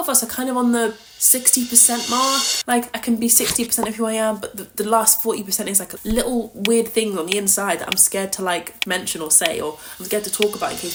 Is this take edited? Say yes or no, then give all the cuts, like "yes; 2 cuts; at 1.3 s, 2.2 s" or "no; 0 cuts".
no; 0 cuts